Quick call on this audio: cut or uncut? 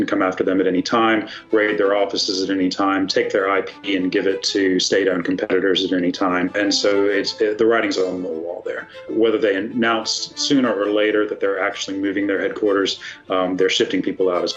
cut